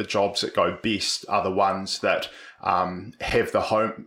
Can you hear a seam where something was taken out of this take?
no; 0 cuts

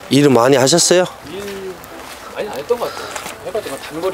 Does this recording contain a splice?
yes; 1 cut; at 1.2 s

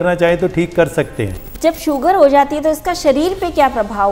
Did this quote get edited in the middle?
yes; 1 cut; at 1.4 s

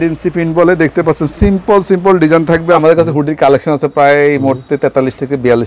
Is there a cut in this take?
yes; 1 cut; at 2.8 s

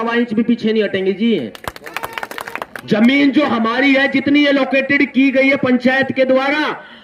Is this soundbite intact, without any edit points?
no; 1 cut; at 2.5 s

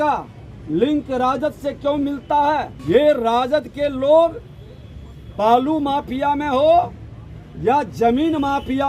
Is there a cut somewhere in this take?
yes; 1 cut; at 2.7 s

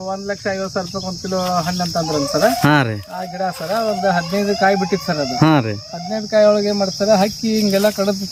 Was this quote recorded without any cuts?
yes; 0 cuts

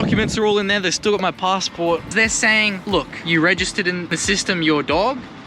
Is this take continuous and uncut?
no; 3 cuts; at 2.1 s, 3.2 s, 4.2 s

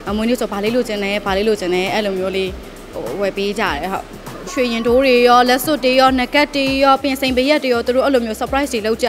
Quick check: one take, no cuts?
no; 1 cut; at 4.5 s

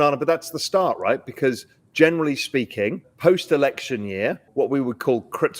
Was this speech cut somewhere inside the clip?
yes; 2 cuts; at 3.1 s, 4.4 s

